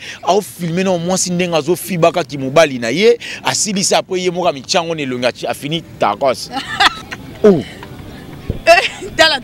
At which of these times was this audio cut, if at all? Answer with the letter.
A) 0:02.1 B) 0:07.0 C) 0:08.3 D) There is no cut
B